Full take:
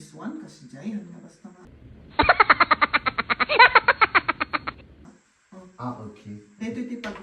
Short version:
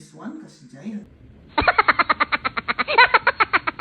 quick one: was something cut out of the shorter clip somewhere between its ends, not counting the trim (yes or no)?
yes